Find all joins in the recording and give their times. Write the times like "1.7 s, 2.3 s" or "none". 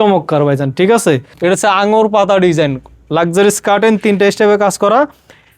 1.3 s